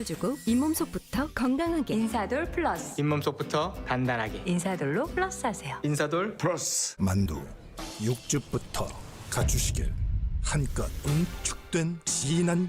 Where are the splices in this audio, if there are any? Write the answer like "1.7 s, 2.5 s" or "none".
6.9 s

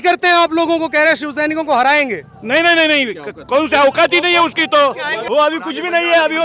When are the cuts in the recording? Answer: 5.1 s

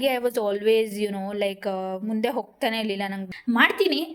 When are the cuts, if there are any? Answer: 3.2 s

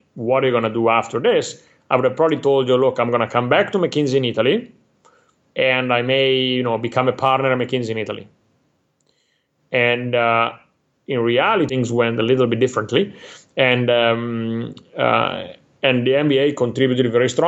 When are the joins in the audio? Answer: 11.7 s

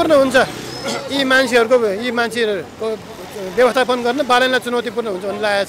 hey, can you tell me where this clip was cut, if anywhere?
none

